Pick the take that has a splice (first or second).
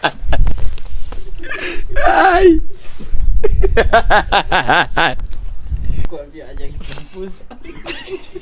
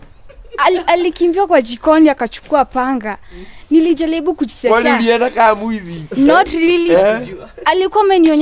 first